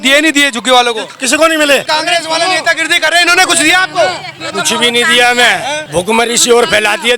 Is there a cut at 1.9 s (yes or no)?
yes